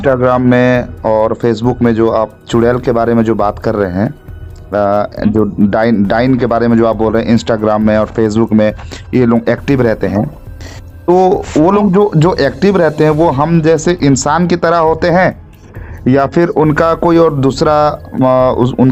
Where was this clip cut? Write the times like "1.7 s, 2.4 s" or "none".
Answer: none

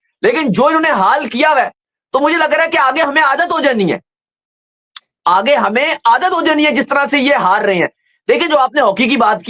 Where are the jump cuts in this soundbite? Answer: none

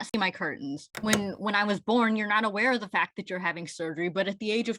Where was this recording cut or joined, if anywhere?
0.9 s

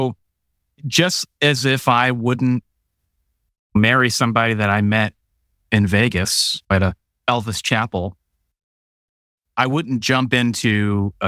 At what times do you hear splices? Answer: 6.5 s

